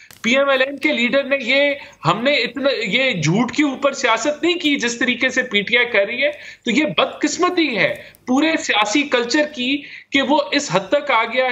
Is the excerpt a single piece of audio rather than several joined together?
yes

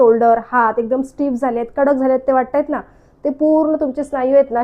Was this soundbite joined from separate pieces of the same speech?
no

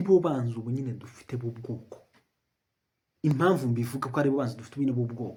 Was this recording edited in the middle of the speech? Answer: no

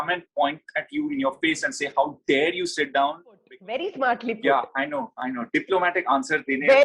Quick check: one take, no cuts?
no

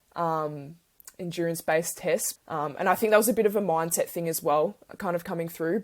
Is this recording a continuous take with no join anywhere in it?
no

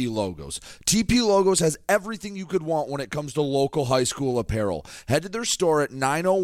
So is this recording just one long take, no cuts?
yes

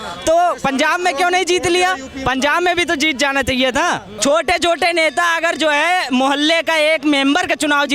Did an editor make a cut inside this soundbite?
yes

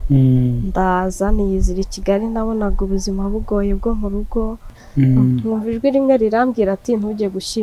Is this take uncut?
no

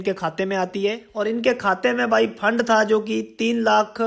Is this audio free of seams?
no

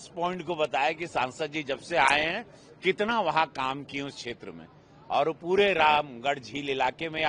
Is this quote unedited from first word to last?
yes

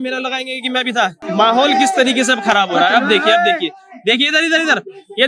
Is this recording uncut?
no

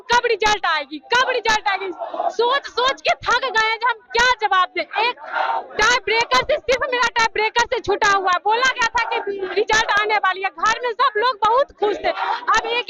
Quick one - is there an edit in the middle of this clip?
no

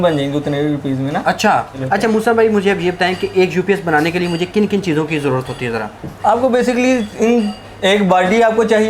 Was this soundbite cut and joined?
no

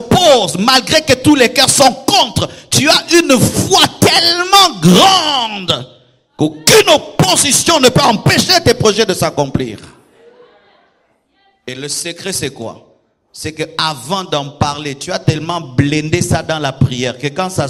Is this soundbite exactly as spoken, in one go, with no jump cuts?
yes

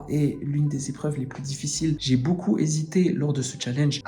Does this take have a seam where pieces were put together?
yes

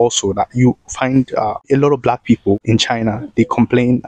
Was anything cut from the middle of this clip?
no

